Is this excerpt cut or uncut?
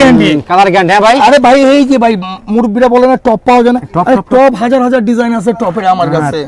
uncut